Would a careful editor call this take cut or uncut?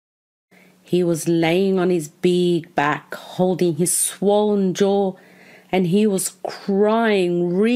uncut